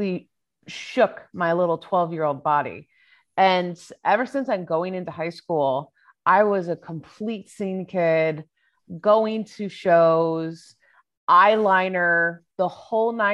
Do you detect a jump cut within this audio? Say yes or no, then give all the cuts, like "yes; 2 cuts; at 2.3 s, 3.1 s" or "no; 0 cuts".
no; 0 cuts